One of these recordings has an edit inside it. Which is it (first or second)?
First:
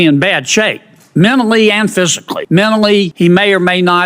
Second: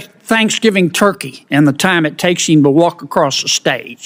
first